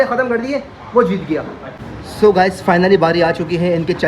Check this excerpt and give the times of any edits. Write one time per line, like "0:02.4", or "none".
0:02.0